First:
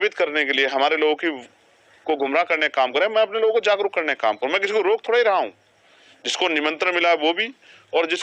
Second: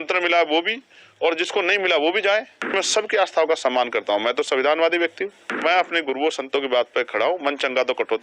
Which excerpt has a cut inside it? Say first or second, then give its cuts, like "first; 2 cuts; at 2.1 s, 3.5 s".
second; 2 cuts; at 2.7 s, 5.5 s